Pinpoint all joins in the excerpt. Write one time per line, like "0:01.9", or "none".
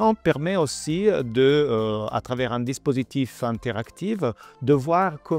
none